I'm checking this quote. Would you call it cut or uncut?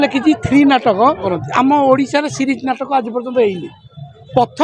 cut